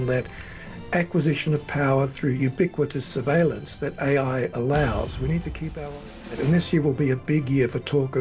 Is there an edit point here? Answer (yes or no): yes